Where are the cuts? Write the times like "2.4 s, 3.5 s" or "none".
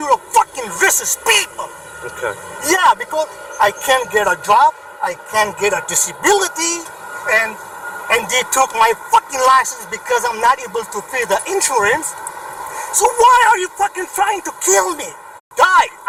none